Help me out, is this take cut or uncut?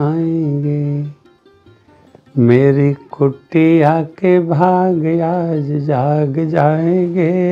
uncut